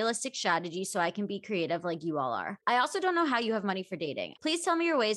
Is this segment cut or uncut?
cut